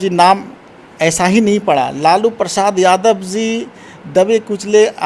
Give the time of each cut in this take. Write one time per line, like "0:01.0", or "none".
none